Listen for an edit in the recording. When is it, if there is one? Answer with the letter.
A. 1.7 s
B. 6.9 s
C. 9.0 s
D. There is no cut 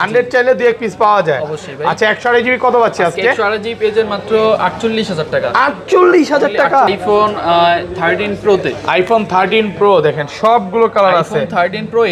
B